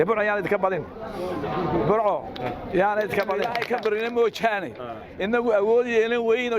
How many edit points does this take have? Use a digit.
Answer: 1